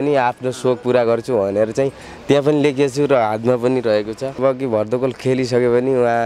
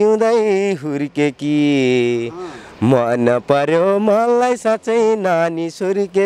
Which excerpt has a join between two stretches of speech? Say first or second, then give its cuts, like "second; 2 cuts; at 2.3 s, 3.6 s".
first; 1 cut; at 4.4 s